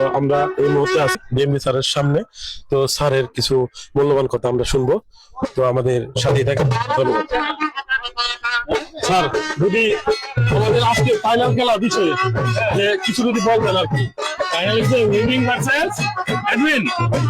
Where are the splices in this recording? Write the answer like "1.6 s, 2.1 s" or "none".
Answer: 1.2 s

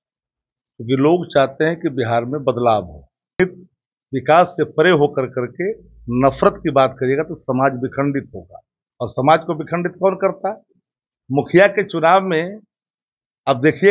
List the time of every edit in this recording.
3.4 s

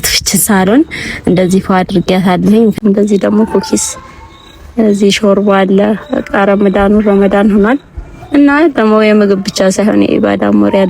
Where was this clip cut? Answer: 2.8 s

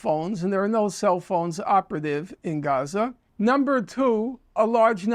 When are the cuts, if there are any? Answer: 3.2 s

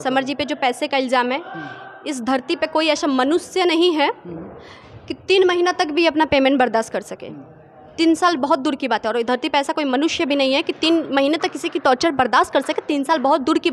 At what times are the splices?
none

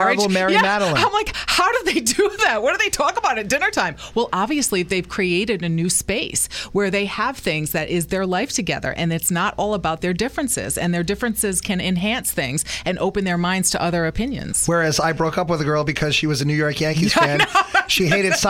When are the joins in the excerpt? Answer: none

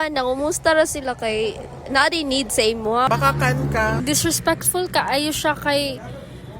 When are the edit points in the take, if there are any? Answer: 3.1 s

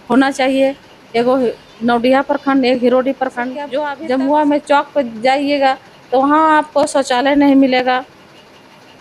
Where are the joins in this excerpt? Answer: 3.7 s

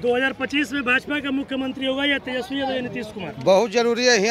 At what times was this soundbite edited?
none

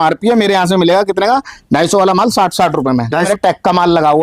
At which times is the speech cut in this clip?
3.3 s

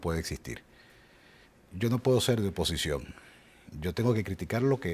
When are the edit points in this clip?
2.4 s

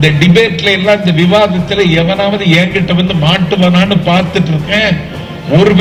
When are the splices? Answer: none

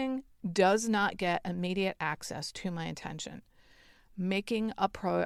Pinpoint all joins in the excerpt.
none

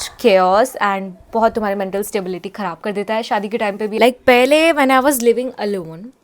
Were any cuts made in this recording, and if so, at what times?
3.9 s

